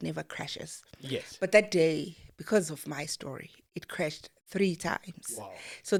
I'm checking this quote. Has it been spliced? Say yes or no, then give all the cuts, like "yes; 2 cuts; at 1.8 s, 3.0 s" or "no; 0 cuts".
no; 0 cuts